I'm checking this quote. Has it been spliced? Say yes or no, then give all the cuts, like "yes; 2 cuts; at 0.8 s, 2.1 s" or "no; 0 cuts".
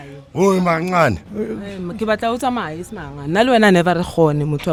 no; 0 cuts